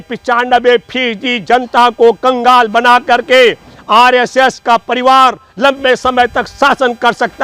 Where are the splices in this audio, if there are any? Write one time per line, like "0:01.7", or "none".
none